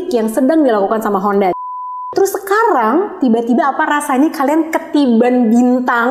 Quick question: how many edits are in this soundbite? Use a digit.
1